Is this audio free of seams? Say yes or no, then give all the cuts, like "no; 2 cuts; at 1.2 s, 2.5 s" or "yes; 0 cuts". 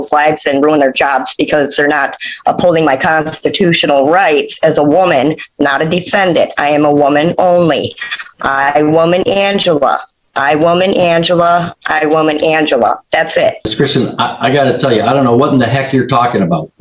no; 1 cut; at 13.6 s